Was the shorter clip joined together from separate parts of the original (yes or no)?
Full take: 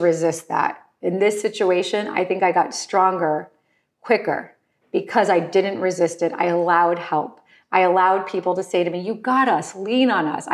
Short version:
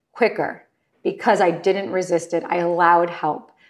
no